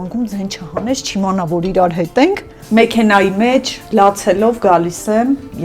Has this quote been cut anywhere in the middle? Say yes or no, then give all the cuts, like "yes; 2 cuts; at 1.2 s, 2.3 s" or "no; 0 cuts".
yes; 1 cut; at 2.5 s